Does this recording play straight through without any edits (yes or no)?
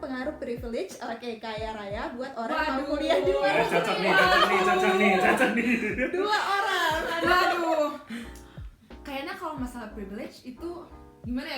yes